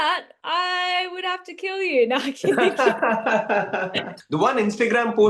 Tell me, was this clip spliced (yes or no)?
yes